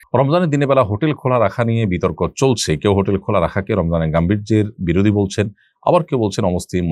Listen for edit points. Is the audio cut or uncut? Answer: uncut